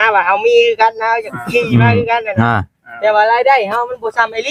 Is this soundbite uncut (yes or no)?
yes